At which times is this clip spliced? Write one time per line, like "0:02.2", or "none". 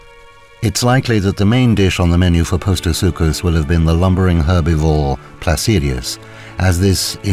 none